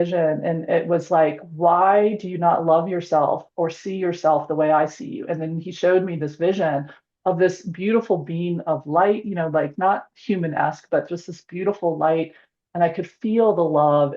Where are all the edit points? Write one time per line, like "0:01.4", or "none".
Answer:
none